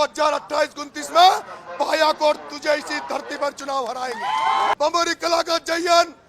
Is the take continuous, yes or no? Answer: no